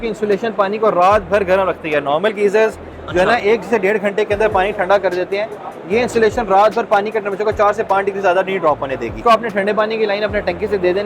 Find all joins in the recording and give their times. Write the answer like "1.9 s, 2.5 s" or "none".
9.2 s